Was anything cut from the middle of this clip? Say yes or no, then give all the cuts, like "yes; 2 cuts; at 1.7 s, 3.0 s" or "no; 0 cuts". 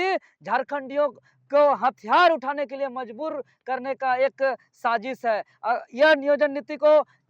no; 0 cuts